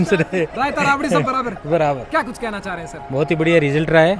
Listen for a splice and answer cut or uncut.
uncut